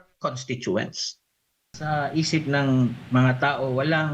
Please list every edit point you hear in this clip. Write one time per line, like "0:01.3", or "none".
0:01.7